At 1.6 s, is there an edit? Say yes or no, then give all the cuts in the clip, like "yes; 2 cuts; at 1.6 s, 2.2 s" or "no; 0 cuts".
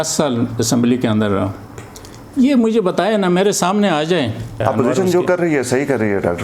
no; 1 cut; at 4.6 s